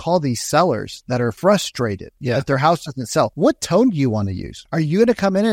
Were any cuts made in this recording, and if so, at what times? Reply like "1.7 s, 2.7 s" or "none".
1.4 s, 2.1 s, 3.3 s, 4.6 s